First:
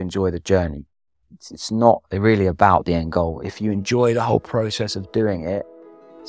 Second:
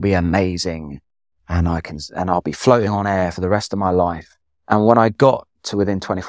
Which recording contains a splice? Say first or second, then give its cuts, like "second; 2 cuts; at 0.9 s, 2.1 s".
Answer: second; 1 cut; at 4.3 s